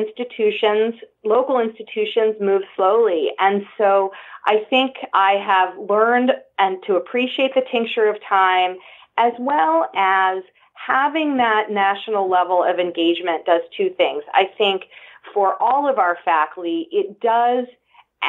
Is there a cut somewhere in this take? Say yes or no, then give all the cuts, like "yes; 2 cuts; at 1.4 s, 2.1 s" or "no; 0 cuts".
yes; 1 cut; at 5.0 s